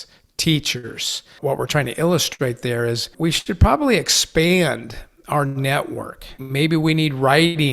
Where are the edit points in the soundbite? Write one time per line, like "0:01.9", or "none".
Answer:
0:01.3
0:03.1
0:06.4